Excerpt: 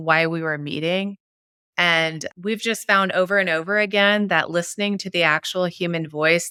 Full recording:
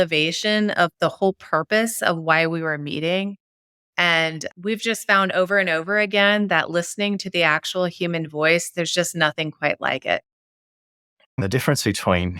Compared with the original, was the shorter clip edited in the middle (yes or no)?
no